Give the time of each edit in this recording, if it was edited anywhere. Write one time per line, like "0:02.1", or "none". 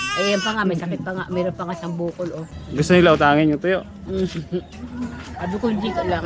0:02.5